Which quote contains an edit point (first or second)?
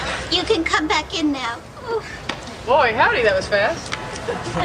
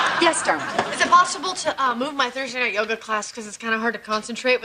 second